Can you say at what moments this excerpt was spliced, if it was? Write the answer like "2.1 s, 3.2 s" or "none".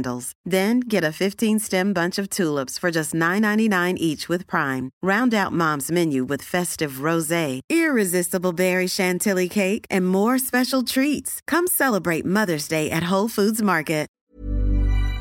14.2 s